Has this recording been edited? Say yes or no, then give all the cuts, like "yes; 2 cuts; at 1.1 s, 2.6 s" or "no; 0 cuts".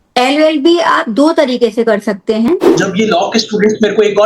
yes; 1 cut; at 2.6 s